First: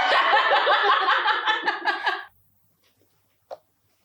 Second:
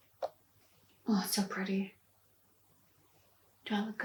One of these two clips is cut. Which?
first; 1 cut; at 2.3 s

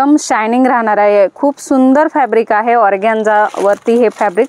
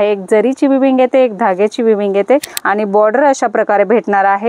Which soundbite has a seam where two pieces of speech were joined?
second; 1 cut; at 2.5 s

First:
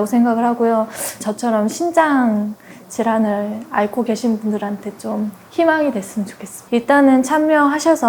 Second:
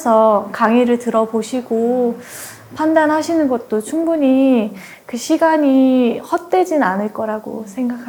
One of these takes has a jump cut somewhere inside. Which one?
first; 2 cuts; at 1.1 s, 6.5 s

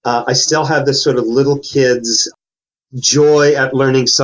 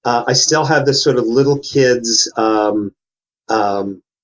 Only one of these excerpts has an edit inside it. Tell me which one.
first; 1 cut; at 2.3 s

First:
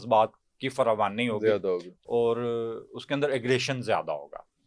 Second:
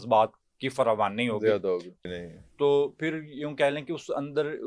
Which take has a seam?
second; 1 cut; at 2.0 s

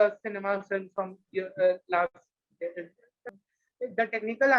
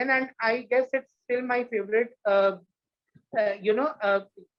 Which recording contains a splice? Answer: first; 1 cut; at 3.3 s

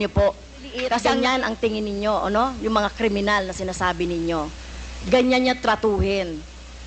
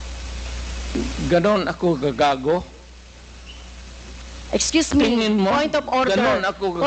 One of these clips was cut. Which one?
first; 1 cut; at 1.1 s

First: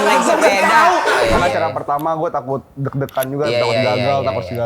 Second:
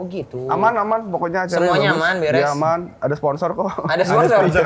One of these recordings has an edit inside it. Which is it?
first; 1 cut; at 1.3 s

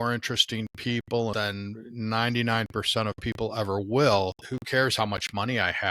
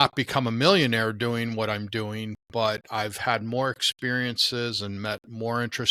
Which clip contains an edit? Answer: first; 2 cuts; at 1.3 s, 4.4 s

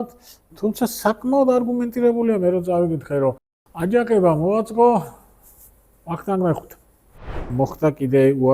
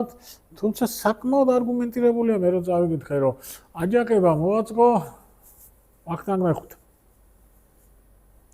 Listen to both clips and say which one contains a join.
first; 1 cut; at 7.5 s

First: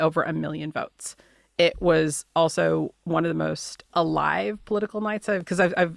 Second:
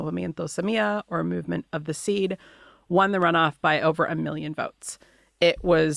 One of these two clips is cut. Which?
first; 1 cut; at 3.9 s

